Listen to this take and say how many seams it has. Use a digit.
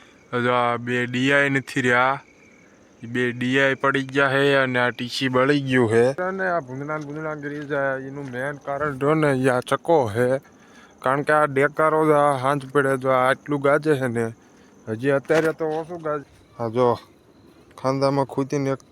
2